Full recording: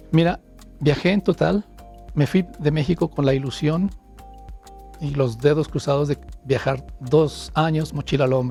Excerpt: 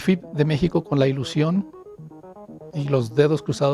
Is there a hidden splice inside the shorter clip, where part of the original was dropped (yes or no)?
no